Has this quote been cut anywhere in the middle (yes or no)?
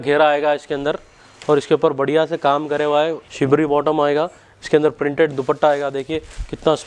yes